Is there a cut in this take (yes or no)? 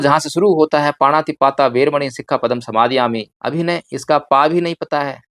yes